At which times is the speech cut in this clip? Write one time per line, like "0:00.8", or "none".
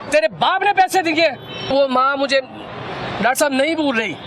0:01.7